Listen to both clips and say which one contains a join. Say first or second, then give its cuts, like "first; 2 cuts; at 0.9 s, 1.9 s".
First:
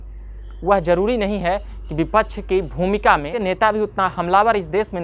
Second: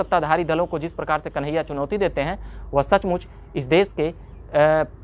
first; 1 cut; at 3.3 s